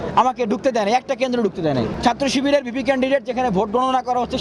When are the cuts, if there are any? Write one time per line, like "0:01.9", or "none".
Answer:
0:01.9